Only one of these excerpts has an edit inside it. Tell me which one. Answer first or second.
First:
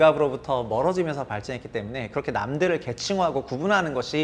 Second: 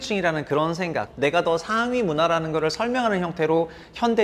second